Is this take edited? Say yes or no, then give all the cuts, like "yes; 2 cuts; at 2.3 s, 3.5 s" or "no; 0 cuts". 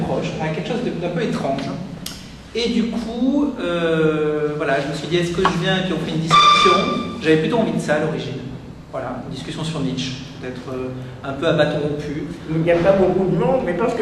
yes; 1 cut; at 5.2 s